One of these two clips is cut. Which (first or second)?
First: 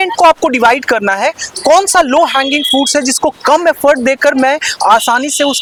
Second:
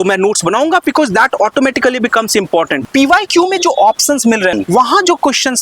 second